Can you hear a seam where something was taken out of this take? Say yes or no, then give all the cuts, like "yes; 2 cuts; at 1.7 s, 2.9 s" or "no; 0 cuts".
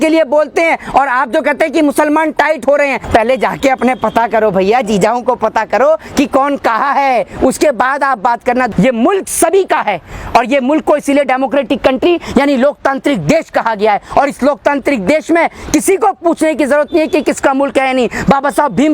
yes; 2 cuts; at 3.0 s, 8.7 s